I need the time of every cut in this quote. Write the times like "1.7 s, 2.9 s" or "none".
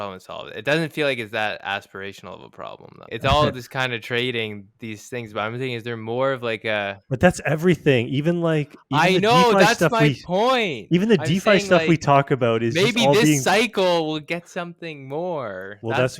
3.0 s